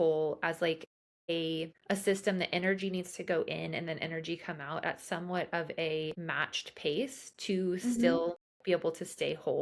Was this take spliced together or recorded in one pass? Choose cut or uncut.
uncut